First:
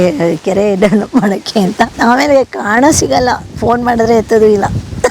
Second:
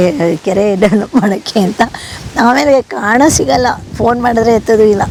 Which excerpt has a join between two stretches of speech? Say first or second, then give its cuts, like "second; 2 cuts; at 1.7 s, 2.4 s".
first; 1 cut; at 1.9 s